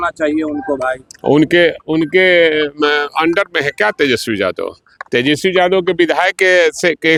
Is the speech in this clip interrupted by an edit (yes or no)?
no